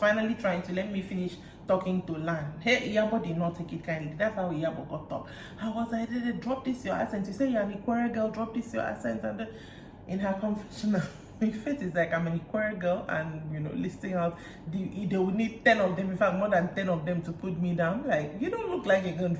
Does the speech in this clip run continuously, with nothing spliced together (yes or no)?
yes